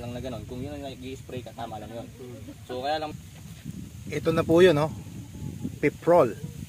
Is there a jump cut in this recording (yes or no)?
yes